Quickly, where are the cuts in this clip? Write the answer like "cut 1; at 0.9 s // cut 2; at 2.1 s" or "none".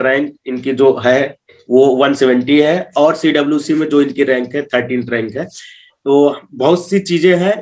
none